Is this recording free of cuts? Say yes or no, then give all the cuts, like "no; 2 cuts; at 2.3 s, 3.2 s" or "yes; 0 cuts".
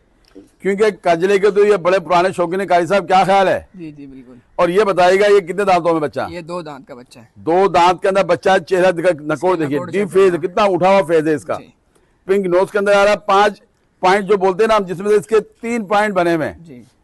yes; 0 cuts